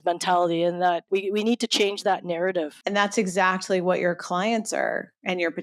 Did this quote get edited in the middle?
yes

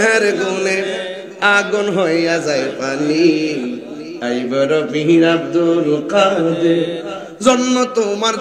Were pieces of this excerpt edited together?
no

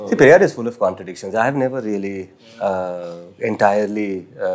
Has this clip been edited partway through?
no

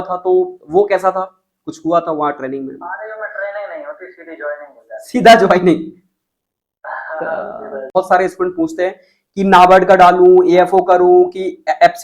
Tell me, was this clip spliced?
yes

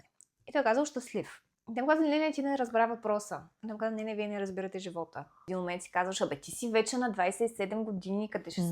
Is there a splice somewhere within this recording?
yes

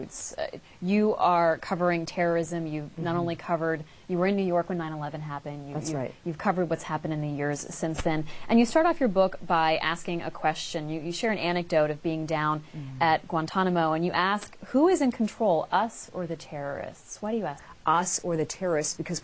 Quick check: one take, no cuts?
yes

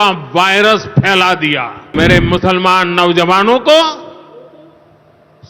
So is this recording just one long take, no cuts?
no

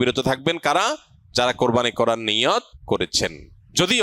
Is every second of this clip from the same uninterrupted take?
no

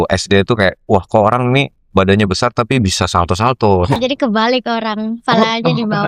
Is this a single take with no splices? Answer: no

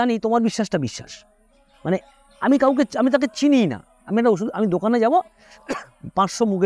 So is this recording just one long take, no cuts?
yes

